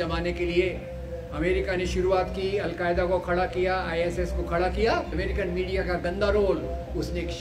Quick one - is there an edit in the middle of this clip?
yes; 1 cut; at 5.1 s

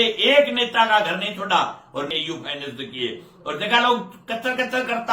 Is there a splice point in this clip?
yes; 1 cut; at 2.1 s

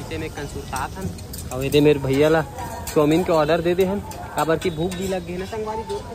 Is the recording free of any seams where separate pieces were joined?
yes; 0 cuts

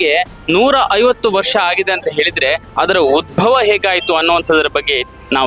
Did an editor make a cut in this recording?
no; 0 cuts

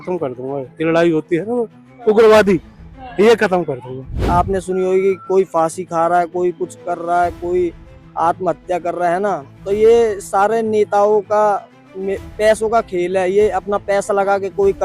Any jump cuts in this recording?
yes; 1 cut; at 4.2 s

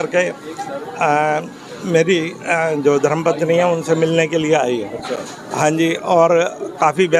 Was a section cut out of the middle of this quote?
no; 0 cuts

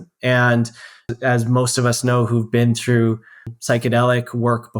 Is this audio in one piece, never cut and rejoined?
no; 2 cuts; at 1.1 s, 3.5 s

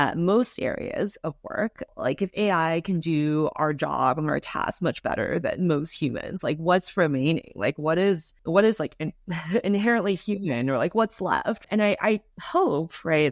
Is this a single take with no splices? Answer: no; 3 cuts; at 1.9 s, 8.3 s, 11.6 s

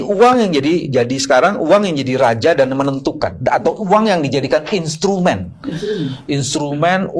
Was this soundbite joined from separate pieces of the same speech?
no; 0 cuts

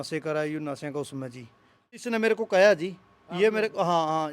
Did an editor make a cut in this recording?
yes; 1 cut; at 2.0 s

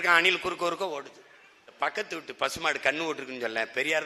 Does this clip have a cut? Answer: yes; 1 cut; at 1.7 s

